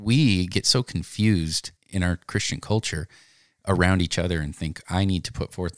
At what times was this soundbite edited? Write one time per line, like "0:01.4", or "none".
0:02.2